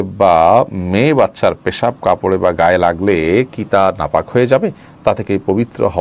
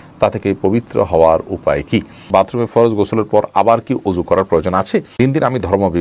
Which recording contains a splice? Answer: second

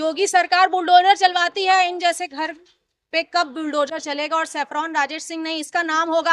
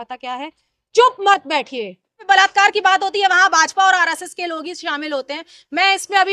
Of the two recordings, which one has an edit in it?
second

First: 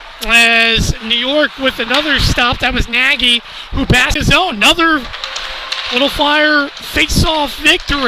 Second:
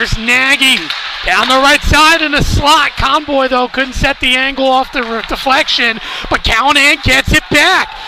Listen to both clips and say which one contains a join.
first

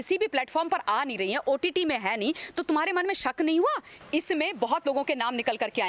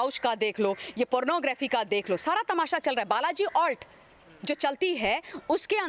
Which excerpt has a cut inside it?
first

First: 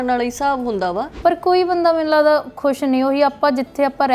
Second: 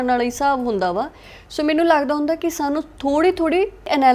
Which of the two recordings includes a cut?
first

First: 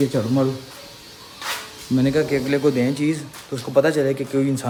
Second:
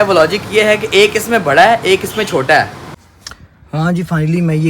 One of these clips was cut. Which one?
second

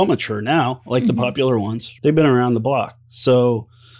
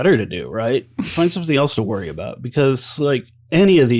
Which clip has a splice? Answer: first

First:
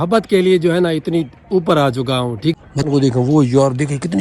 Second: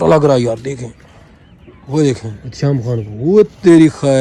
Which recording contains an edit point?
first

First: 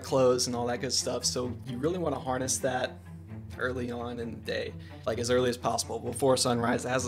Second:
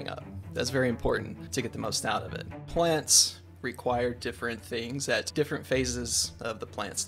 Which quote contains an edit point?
second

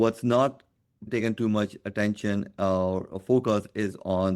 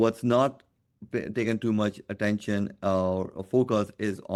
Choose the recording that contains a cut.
first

